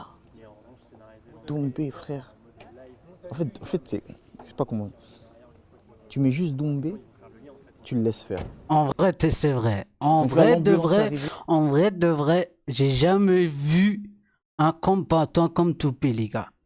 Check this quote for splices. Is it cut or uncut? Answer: uncut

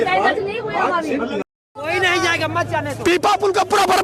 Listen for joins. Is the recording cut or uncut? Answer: cut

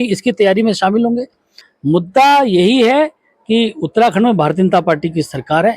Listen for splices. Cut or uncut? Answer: cut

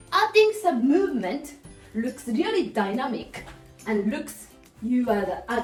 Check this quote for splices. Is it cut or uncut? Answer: uncut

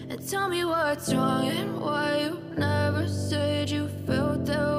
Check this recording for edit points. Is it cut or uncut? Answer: uncut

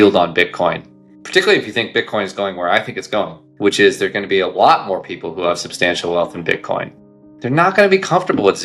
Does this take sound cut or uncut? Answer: cut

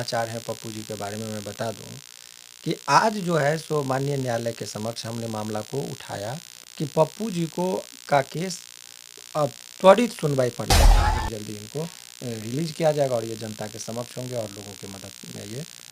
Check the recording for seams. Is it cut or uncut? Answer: cut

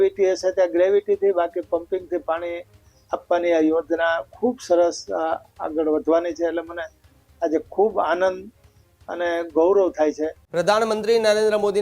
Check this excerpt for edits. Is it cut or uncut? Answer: cut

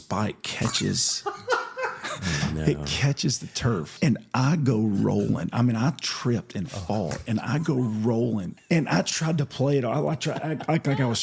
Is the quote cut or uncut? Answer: cut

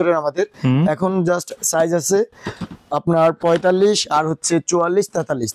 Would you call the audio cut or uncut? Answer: uncut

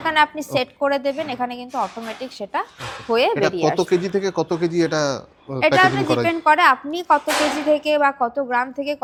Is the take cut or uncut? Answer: uncut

